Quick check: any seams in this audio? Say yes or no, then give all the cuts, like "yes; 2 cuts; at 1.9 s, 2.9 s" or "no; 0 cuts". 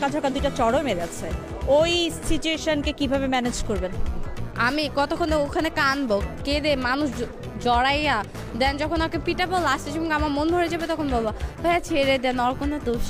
no; 0 cuts